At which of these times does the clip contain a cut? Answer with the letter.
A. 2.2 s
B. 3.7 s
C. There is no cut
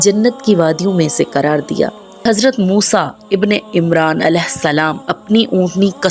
A